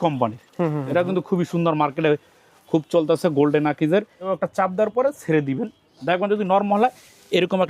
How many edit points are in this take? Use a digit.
1